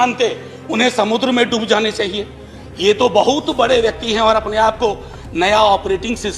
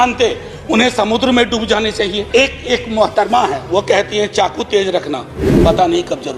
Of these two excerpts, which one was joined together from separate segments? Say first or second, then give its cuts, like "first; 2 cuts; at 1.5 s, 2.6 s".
second; 1 cut; at 2.2 s